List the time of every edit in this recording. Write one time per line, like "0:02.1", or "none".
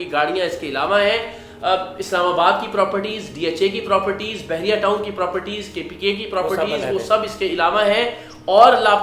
none